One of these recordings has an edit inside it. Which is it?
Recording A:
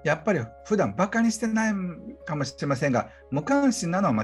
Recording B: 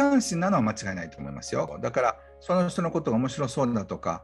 B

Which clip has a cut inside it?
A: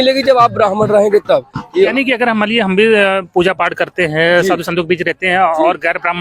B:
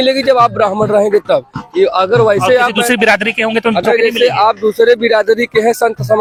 A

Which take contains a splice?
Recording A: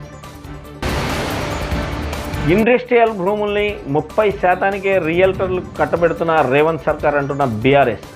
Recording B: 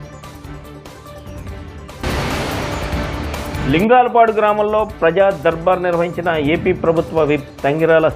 A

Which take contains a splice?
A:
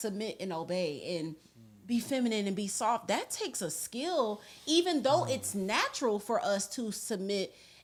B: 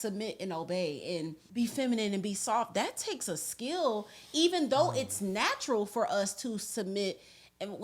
B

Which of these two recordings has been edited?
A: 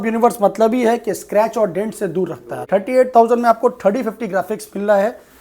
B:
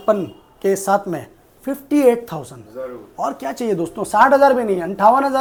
A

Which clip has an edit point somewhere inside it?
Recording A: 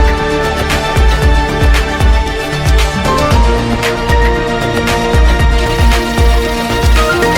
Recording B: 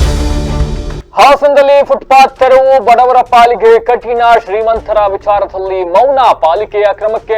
B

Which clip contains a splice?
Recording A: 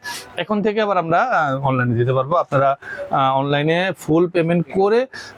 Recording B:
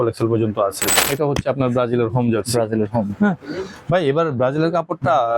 B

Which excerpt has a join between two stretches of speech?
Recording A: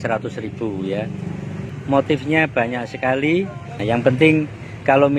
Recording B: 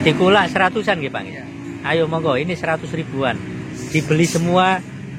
A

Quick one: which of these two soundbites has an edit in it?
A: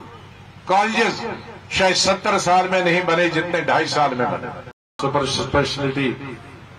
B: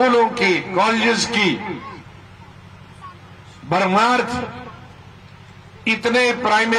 A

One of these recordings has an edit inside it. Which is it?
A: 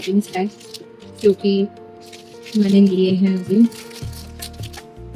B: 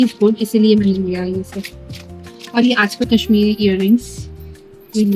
B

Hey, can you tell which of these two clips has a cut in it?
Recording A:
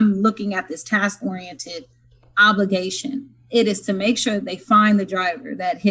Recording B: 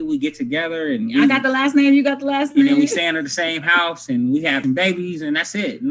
B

